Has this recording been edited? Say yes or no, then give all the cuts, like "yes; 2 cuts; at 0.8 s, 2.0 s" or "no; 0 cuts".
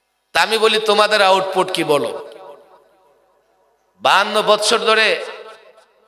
no; 0 cuts